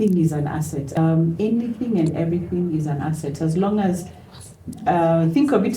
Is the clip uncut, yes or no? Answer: no